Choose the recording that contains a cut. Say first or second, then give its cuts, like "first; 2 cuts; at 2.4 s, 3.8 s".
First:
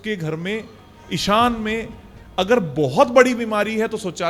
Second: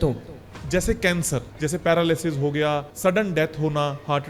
second; 2 cuts; at 1.5 s, 2.9 s